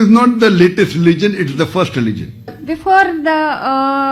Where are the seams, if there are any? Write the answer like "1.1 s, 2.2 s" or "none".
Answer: 2.6 s